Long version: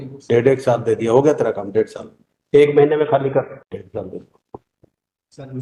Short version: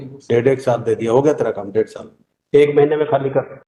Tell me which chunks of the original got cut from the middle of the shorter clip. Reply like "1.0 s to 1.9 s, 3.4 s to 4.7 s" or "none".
none